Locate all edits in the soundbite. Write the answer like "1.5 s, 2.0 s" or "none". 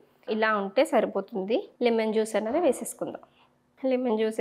1.7 s